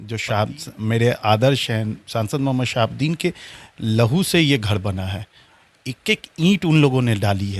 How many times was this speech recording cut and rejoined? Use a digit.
0